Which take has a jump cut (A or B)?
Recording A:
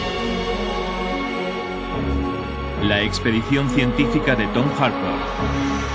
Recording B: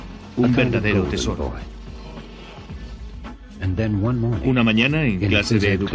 B